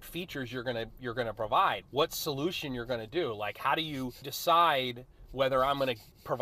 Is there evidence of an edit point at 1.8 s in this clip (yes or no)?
yes